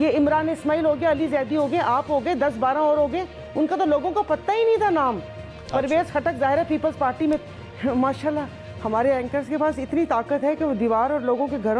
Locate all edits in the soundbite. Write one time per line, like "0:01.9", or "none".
0:07.4